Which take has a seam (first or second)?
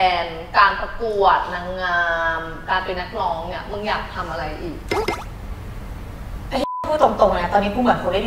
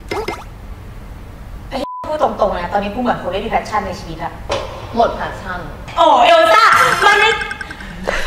second